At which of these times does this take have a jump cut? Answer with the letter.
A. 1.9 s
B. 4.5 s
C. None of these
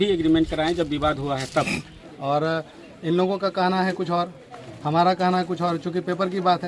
A